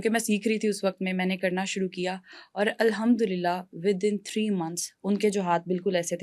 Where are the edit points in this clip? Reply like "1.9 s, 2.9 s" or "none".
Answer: none